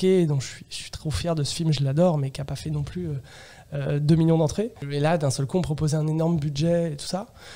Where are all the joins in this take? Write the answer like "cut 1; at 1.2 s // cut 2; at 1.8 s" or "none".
cut 1; at 4.8 s